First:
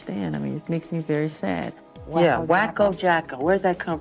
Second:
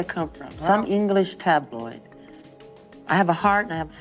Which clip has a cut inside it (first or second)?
first